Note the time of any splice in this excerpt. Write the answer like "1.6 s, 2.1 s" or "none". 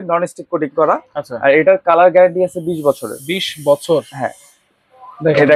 none